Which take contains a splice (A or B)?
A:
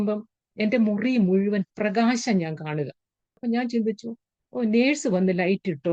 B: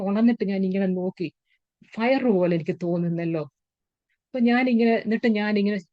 A